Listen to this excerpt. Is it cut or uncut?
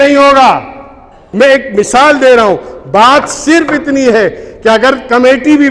cut